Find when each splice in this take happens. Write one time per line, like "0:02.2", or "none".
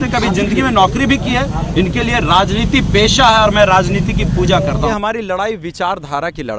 0:04.9